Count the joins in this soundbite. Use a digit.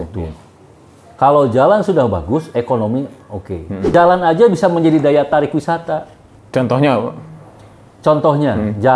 1